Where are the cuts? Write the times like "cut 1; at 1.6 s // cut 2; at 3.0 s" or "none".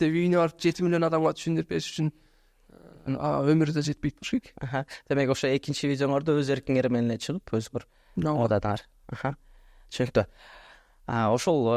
none

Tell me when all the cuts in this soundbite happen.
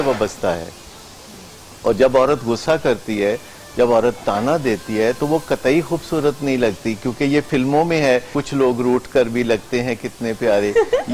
cut 1; at 8.4 s

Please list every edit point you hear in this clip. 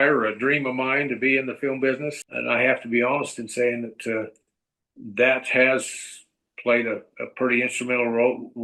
cut 1; at 2.2 s

